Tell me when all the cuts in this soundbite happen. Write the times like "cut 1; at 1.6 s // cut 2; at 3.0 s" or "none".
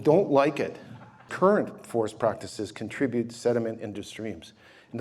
cut 1; at 1.3 s

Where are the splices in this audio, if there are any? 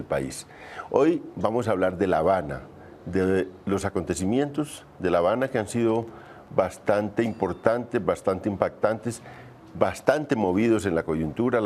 none

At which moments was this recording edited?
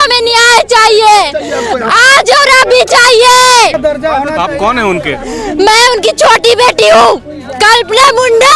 cut 1; at 3.8 s

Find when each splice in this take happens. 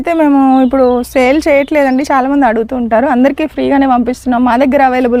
none

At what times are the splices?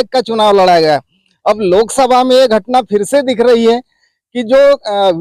none

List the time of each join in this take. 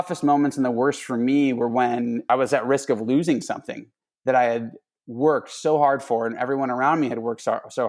cut 1; at 2.3 s

